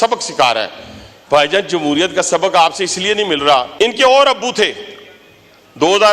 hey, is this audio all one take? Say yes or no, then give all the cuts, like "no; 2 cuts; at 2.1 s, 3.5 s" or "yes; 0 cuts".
no; 1 cut; at 3.7 s